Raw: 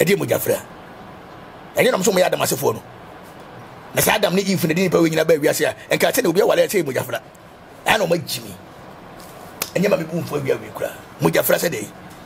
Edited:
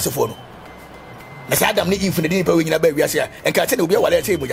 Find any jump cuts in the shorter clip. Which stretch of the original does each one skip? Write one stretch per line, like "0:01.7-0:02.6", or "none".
none